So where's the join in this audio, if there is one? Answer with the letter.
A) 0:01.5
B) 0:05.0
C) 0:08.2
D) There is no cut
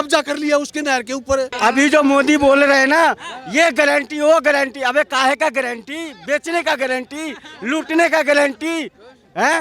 A